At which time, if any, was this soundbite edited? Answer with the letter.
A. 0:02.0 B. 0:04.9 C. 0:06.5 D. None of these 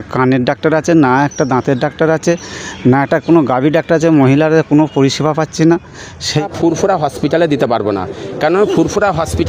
C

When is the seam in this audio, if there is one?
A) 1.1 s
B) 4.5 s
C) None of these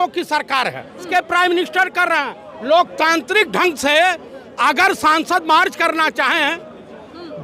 A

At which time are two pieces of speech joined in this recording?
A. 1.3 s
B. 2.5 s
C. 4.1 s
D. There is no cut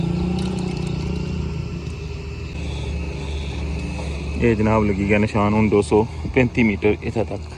B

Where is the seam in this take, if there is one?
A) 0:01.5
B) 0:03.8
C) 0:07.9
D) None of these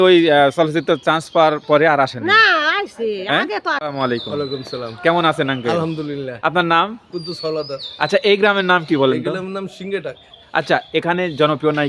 B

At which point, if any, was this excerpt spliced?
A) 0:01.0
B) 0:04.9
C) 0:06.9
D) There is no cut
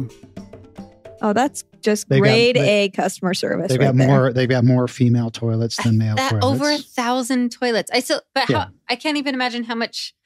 A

